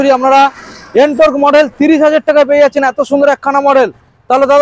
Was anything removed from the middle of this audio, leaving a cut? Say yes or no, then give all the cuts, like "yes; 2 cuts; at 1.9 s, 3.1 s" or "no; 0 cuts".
no; 0 cuts